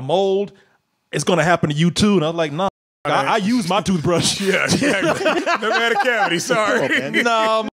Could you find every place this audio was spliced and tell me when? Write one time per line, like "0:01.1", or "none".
none